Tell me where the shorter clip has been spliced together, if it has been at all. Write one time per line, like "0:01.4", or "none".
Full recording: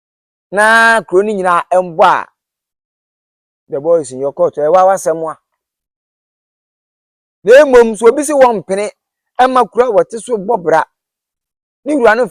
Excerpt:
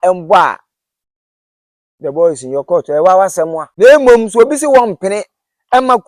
0:03.6